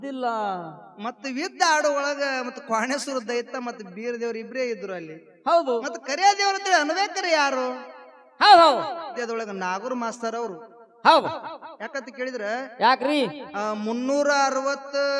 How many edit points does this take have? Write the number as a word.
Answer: one